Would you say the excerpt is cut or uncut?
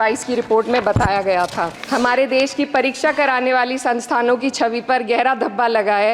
cut